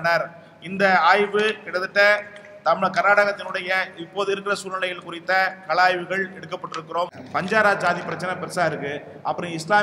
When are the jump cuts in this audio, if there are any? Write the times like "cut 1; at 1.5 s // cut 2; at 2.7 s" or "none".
cut 1; at 7.2 s